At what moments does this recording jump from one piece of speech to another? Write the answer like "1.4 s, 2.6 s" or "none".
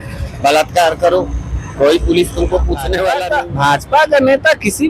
3.2 s

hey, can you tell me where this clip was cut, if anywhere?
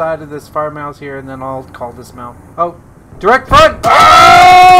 2.4 s, 3.8 s

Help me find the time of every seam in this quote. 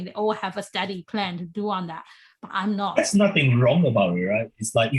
none

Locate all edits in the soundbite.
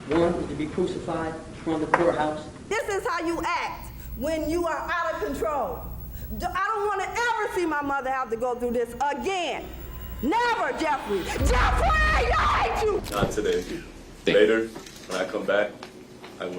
2.7 s, 13.0 s

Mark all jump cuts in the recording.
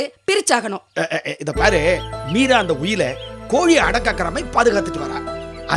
none

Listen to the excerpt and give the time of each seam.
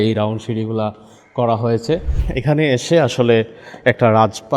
2.2 s

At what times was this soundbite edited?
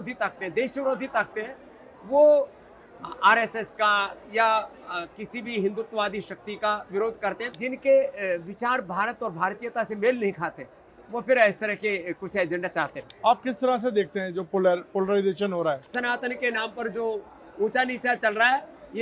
7.4 s, 13.0 s, 15.9 s

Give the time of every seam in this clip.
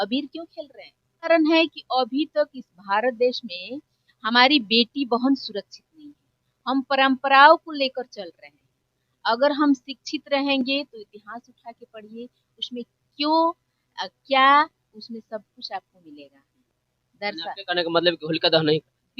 1.3 s

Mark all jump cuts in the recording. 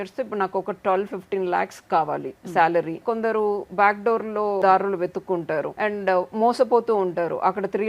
3.0 s, 4.6 s, 5.7 s

